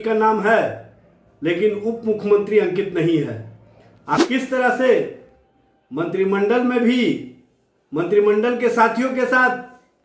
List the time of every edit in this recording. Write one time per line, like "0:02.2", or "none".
0:04.2